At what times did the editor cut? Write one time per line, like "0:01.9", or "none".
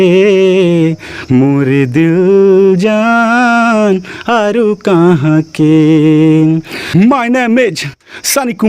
0:06.7